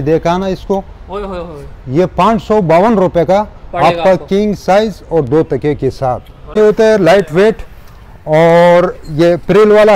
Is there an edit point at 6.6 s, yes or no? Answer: yes